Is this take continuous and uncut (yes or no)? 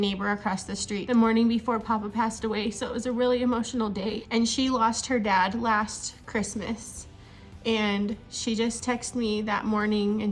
no